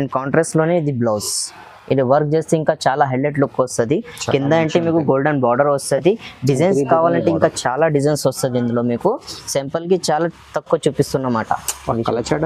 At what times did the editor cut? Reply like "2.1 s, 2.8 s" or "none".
none